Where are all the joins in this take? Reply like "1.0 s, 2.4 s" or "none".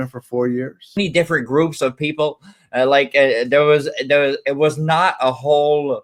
1.0 s